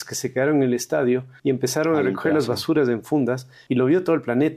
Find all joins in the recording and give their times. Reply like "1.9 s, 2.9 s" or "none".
1.3 s, 3.5 s